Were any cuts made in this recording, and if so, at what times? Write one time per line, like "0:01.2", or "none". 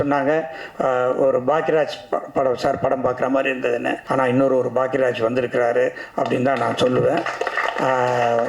0:04.0